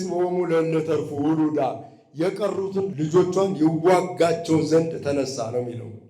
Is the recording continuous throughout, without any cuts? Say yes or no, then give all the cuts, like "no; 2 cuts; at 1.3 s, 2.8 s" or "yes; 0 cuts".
no; 1 cut; at 2.9 s